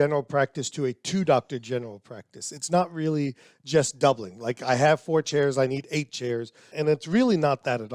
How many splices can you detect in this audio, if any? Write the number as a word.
one